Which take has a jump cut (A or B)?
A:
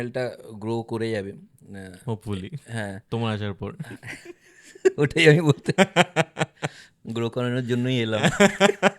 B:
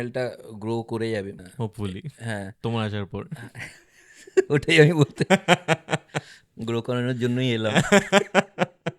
B